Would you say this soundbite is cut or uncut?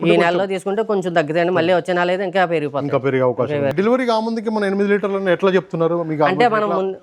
cut